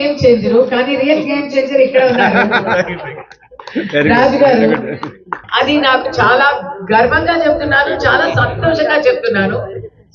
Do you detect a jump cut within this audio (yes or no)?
yes